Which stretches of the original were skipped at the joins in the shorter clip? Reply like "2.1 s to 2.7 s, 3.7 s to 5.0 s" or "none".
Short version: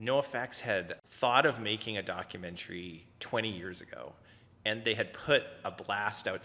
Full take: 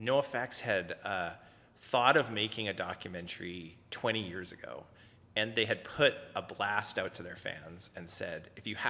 1.0 s to 1.7 s

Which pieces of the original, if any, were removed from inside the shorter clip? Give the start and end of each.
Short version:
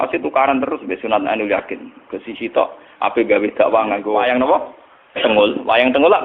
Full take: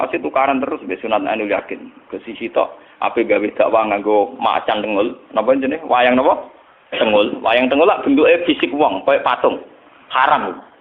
4.1 s to 5.9 s

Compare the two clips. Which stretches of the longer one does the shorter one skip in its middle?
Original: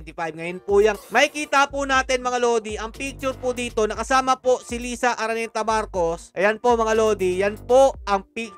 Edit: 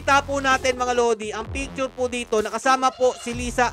none

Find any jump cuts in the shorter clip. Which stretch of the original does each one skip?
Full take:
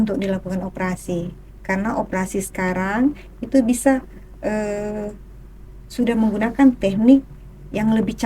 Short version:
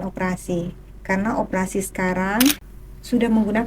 3.3 s to 5.6 s

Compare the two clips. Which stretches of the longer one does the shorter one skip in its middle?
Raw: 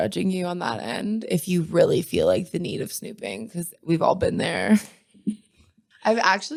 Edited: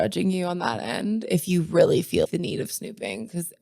2.2 s to 2.5 s

